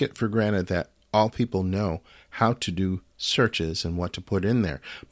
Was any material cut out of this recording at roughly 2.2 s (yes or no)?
no